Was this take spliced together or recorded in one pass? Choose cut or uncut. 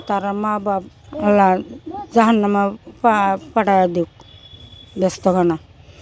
cut